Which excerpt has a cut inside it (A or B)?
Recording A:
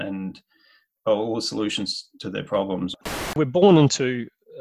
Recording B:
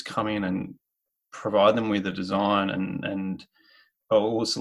A